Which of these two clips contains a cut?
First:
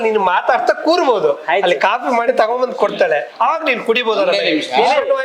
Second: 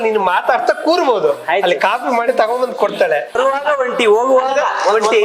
second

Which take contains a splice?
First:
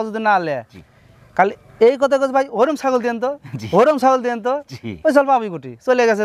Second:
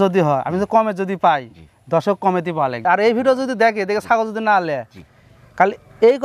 second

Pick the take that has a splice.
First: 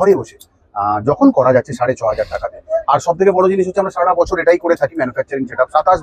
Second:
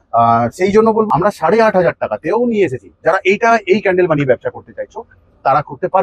second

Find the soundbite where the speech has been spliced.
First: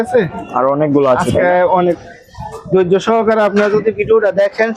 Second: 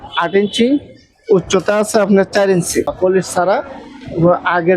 second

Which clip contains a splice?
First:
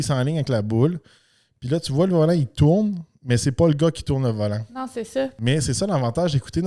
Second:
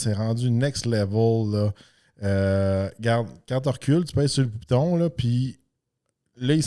first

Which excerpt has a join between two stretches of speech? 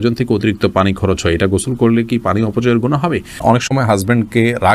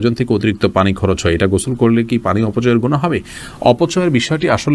first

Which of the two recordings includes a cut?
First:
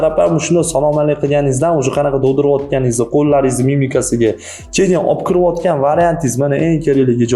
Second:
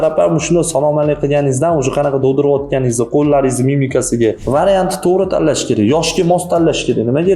second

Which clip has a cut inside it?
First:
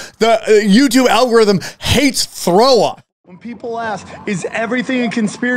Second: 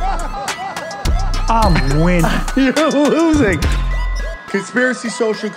first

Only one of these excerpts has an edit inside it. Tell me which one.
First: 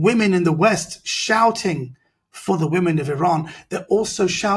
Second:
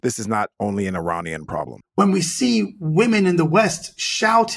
second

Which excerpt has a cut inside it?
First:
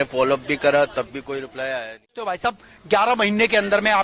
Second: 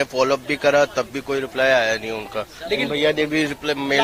first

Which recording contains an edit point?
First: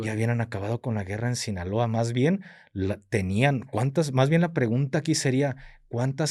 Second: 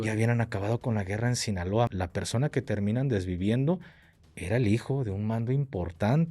second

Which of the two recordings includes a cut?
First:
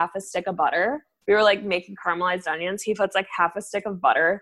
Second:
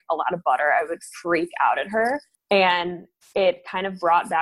second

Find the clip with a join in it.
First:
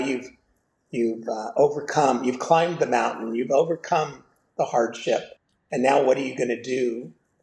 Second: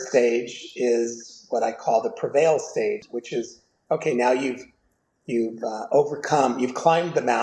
second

